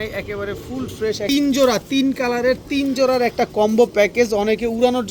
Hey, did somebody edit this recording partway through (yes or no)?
yes